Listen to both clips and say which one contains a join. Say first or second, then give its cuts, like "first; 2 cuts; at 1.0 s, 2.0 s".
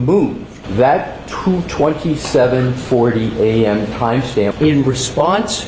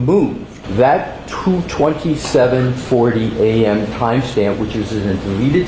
first; 1 cut; at 4.5 s